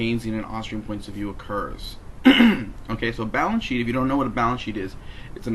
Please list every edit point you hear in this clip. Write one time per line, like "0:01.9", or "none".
none